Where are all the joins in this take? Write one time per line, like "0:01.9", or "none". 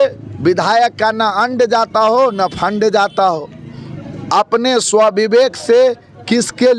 none